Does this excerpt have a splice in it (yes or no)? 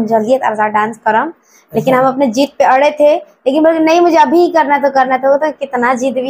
no